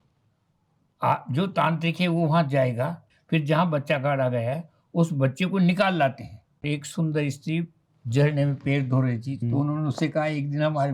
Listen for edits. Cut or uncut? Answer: cut